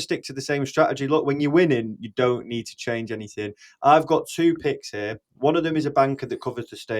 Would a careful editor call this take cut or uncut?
uncut